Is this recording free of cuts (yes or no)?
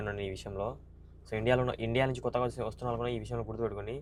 yes